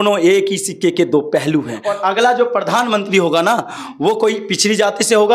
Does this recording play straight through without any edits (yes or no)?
no